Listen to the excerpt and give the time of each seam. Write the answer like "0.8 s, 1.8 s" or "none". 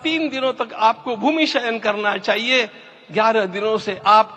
none